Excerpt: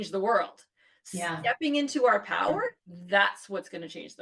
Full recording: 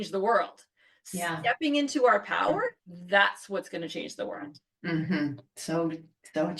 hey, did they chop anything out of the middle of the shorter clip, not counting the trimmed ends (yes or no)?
no